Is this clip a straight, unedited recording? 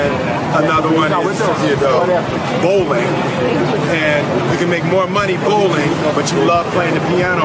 no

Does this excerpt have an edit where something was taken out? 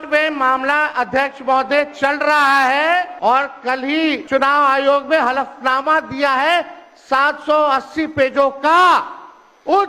no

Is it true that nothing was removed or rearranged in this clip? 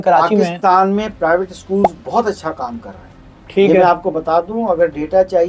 yes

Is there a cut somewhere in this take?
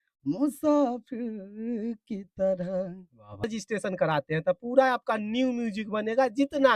yes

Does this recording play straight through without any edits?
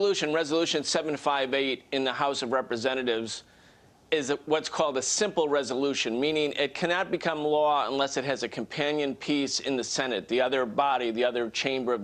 no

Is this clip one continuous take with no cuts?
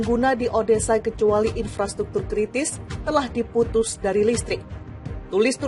yes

